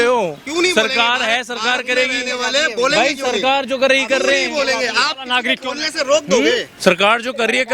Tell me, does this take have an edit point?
yes; 1 cut; at 6.7 s

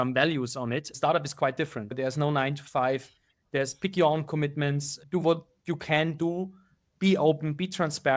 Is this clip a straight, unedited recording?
no; 3 cuts; at 0.9 s, 1.9 s, 4.9 s

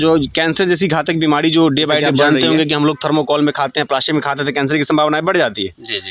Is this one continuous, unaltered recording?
no; 1 cut; at 2.1 s

